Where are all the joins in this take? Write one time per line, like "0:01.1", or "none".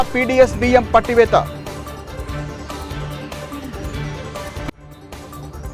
none